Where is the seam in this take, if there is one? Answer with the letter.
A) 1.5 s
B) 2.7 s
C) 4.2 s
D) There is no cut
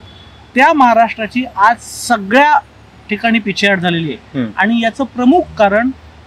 D